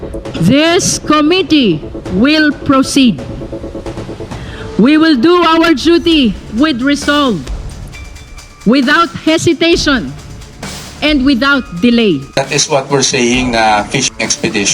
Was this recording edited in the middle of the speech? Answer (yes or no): yes